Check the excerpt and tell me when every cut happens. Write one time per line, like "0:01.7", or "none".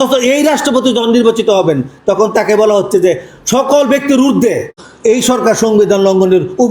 0:04.9